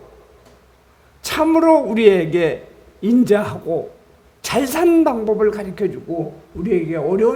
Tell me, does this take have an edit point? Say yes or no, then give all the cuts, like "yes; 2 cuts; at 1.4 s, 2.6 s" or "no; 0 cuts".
no; 0 cuts